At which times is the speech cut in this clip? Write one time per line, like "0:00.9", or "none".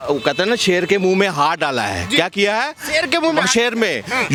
none

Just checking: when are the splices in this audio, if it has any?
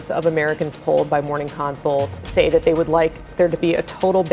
0:02.2

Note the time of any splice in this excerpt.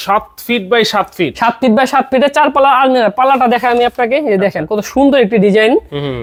none

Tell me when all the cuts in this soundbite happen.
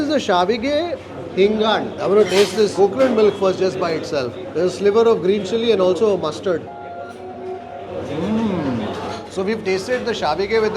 0:01.9
0:09.2

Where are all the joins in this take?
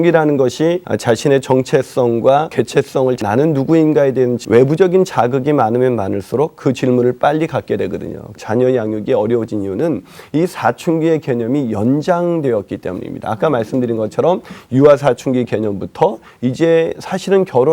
0:00.9
0:02.9
0:04.4
0:08.3

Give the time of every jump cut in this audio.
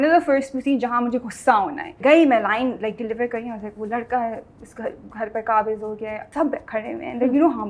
0:01.9
0:06.2

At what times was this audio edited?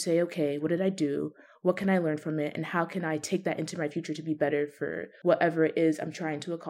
0:05.1

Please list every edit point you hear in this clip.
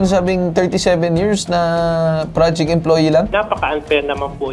0:03.3

